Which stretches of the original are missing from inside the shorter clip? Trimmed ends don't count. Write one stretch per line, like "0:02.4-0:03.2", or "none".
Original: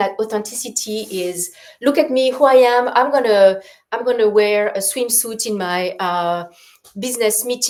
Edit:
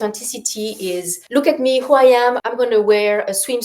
0:01.5-0:01.7
0:02.9-0:03.9